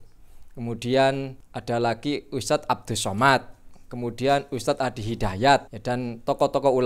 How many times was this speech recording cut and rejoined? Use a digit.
2